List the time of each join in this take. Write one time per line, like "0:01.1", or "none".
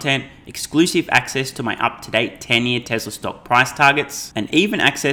none